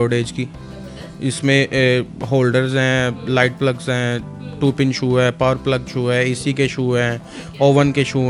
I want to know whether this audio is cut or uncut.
uncut